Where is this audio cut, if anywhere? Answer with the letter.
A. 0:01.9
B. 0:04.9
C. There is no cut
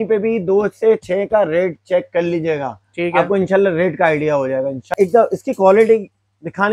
B